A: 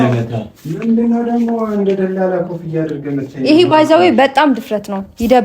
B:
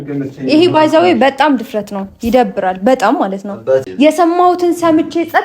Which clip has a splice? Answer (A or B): B